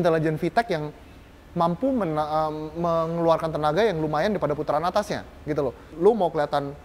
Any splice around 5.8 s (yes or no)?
yes